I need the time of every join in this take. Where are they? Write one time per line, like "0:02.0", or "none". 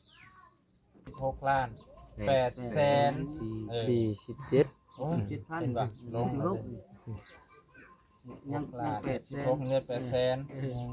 none